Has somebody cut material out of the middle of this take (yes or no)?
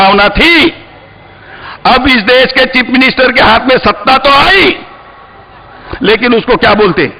no